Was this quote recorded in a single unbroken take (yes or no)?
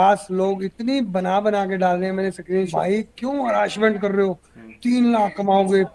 no